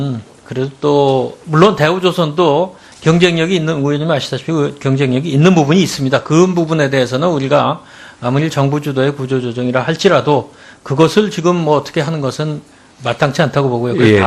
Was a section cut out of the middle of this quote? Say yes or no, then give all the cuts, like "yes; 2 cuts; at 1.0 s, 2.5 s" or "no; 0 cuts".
yes; 1 cut; at 5.9 s